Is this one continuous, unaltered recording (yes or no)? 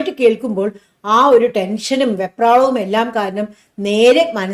yes